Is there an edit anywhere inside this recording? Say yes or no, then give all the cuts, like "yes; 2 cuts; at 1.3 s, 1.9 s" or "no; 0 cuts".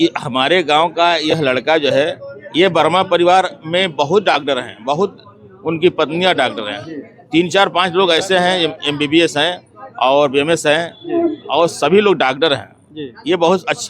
no; 0 cuts